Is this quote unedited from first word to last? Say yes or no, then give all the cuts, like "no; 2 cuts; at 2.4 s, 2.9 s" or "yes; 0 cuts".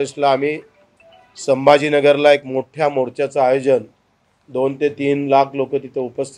yes; 0 cuts